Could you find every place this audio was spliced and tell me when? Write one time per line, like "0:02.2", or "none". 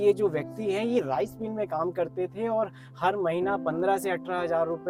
none